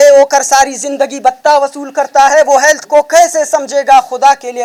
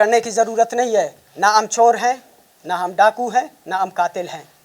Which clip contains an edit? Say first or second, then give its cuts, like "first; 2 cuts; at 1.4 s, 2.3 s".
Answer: second; 1 cut; at 1.2 s